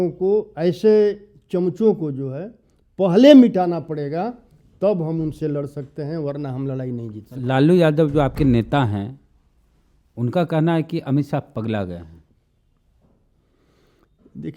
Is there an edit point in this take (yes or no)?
no